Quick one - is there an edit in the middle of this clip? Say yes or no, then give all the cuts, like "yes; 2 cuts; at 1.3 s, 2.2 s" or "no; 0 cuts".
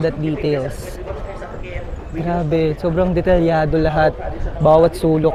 no; 0 cuts